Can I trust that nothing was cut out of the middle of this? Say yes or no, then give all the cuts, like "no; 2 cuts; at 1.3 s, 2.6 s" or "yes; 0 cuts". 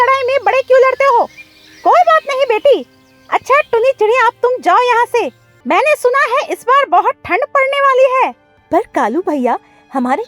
no; 2 cuts; at 5.5 s, 8.5 s